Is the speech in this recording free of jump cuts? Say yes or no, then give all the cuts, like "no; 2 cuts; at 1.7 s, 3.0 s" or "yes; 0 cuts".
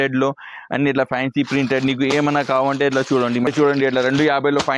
no; 1 cut; at 3.5 s